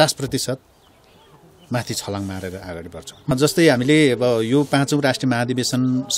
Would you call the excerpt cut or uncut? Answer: cut